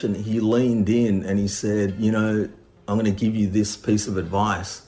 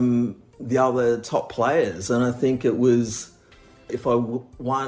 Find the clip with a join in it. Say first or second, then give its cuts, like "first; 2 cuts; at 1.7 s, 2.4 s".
second; 1 cut; at 4.0 s